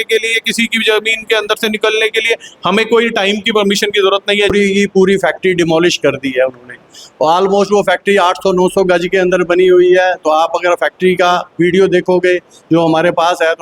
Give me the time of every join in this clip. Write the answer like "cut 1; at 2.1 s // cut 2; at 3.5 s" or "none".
cut 1; at 4.5 s